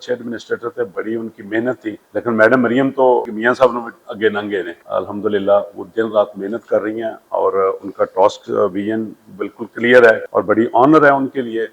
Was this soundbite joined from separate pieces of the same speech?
yes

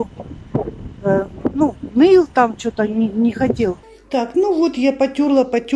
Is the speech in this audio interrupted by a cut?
yes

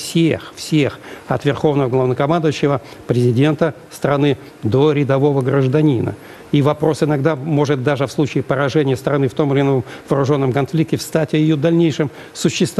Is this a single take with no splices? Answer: yes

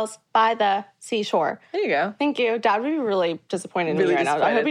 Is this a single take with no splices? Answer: yes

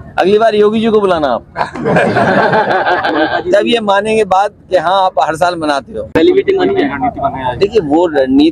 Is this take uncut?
yes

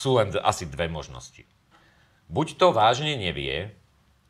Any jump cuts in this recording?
no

